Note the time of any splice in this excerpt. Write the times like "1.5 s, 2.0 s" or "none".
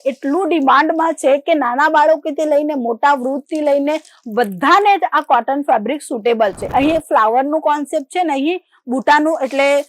6.6 s